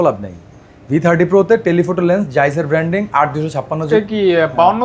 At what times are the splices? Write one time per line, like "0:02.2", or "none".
0:03.8